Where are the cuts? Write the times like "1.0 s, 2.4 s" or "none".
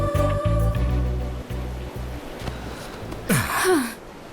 1.0 s